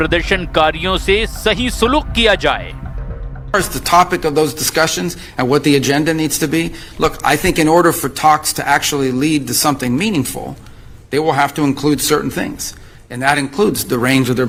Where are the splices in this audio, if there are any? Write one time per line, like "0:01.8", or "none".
none